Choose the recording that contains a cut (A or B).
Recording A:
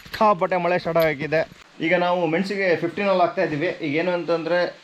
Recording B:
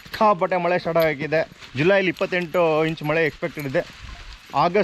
A